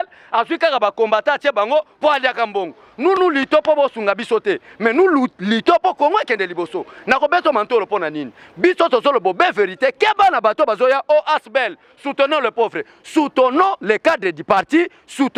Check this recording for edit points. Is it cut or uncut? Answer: uncut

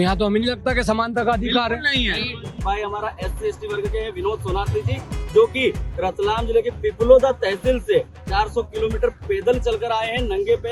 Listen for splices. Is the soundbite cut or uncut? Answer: cut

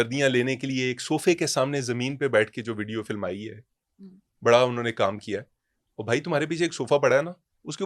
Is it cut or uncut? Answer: uncut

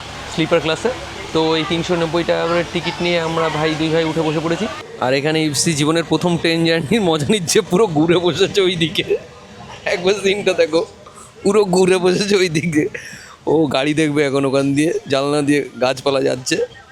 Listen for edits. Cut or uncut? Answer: cut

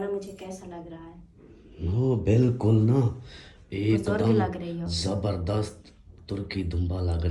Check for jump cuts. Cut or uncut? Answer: uncut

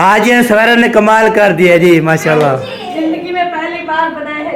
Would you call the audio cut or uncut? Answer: uncut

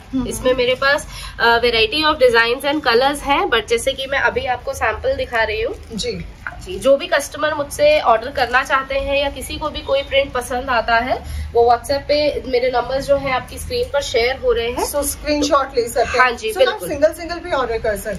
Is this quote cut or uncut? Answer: uncut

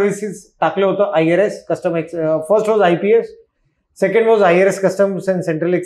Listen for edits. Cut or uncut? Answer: uncut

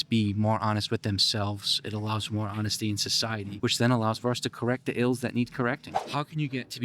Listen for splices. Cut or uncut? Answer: cut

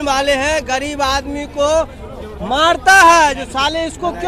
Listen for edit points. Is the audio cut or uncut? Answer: uncut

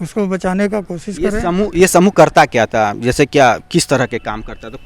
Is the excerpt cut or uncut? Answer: uncut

